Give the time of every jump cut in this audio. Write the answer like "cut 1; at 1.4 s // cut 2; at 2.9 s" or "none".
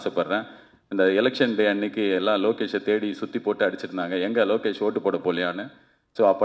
none